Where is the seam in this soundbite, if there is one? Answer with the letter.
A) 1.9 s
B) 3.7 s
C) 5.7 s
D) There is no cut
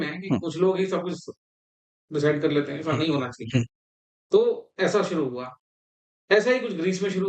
D